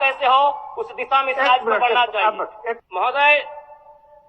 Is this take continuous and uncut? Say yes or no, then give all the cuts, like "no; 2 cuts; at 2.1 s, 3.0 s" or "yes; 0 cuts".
no; 1 cut; at 2.8 s